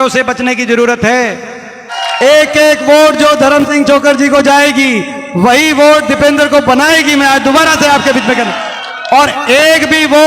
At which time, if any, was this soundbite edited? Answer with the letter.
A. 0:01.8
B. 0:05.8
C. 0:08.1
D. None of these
A